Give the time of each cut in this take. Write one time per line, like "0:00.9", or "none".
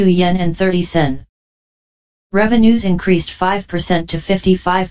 0:02.6